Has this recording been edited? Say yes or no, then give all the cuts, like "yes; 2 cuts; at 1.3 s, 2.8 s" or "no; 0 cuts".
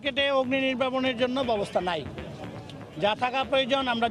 no; 0 cuts